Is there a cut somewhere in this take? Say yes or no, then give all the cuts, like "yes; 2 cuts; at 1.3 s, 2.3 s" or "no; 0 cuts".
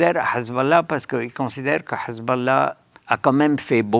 yes; 1 cut; at 2.9 s